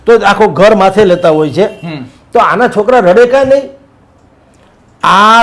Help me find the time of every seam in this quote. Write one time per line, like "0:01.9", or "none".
none